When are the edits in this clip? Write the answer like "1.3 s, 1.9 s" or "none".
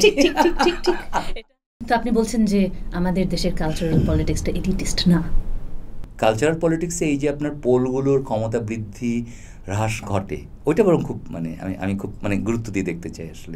1.3 s, 5.9 s